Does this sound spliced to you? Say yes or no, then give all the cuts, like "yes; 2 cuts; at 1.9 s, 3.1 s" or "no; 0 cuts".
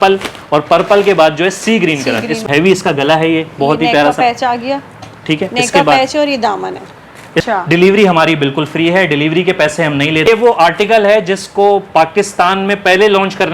yes; 3 cuts; at 2.4 s, 7.5 s, 10.3 s